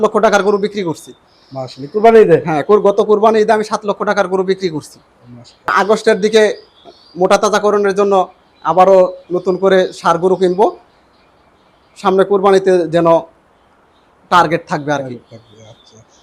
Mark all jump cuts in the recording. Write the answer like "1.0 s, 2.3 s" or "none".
5.7 s